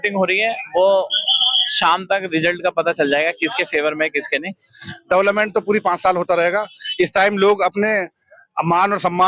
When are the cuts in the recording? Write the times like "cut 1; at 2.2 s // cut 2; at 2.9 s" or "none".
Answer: cut 1; at 4.6 s